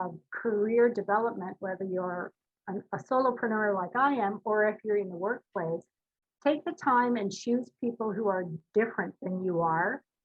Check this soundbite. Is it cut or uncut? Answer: uncut